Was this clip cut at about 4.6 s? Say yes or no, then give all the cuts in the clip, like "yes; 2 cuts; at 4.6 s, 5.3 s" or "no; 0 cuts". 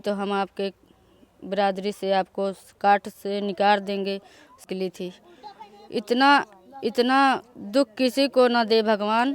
yes; 1 cut; at 4.6 s